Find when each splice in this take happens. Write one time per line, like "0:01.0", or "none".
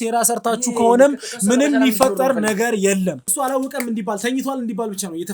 0:03.3